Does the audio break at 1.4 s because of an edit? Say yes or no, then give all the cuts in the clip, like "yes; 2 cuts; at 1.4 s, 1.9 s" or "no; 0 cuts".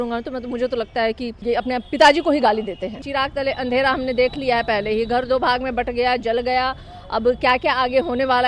yes; 2 cuts; at 1.4 s, 3.0 s